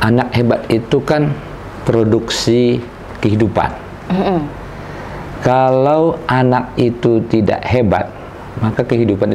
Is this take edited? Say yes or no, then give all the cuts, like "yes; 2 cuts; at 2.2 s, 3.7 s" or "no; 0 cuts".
no; 0 cuts